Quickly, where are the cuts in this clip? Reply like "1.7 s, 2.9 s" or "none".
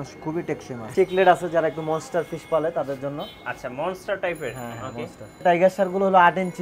0.9 s, 5.4 s